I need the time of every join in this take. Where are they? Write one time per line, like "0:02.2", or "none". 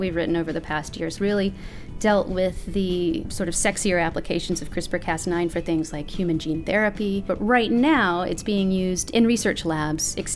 0:01.1
0:03.3
0:07.3